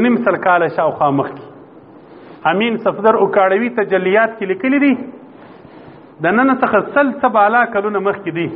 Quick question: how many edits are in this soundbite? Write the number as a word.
zero